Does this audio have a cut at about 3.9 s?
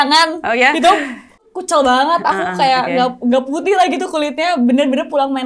no; 1 cut; at 1.5 s

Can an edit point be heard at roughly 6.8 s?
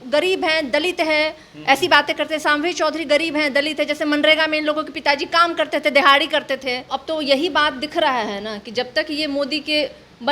yes; 1 cut; at 6.8 s

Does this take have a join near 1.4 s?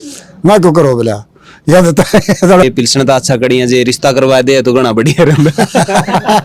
no; 1 cut; at 2.6 s

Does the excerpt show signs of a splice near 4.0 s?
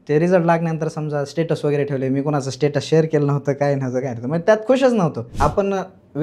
no; 1 cut; at 5.2 s

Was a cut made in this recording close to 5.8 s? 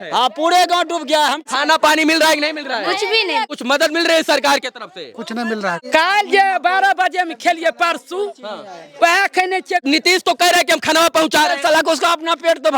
yes; 4 cuts; at 1.5 s, 3.5 s, 5.8 s, 9.8 s

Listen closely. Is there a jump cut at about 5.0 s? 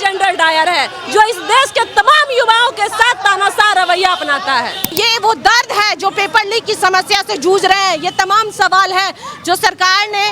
yes; 1 cut; at 5.0 s

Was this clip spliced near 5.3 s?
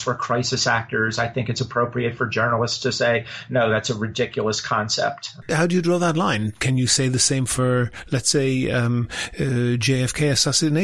yes; 1 cut; at 5.3 s

